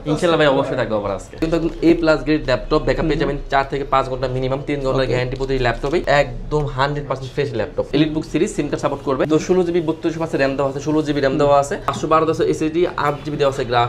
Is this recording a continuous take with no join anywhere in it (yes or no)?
no